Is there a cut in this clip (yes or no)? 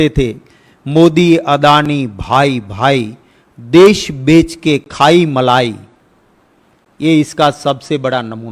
no